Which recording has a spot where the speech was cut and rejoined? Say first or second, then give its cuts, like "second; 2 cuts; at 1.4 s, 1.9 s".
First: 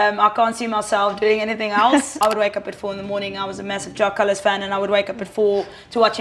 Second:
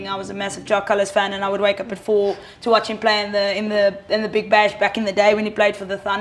first; 1 cut; at 2.2 s